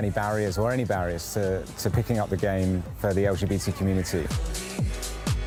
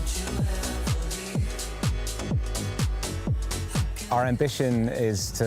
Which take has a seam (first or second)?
second